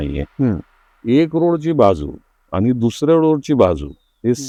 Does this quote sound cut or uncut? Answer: uncut